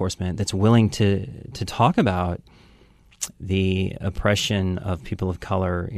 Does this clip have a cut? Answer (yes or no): no